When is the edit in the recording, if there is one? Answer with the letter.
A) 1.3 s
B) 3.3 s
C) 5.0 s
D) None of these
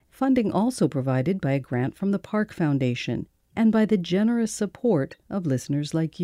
B